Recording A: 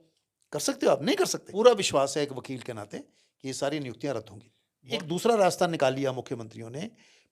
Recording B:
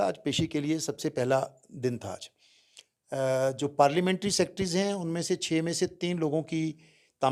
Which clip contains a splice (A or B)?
A